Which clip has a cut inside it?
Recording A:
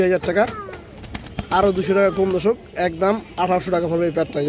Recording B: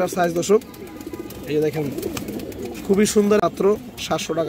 B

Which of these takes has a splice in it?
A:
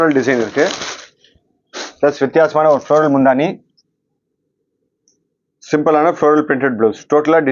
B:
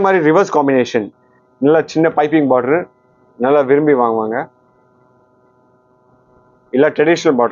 B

